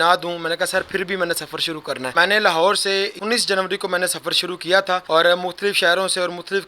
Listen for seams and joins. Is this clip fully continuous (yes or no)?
no